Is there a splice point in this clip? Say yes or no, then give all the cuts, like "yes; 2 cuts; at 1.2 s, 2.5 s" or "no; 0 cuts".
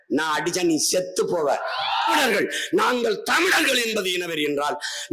yes; 1 cut; at 2.2 s